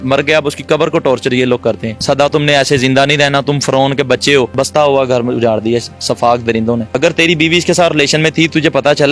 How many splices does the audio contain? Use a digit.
3